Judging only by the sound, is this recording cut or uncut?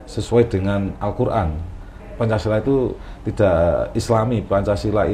cut